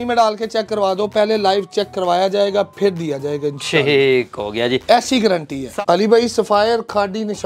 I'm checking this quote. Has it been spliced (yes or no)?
yes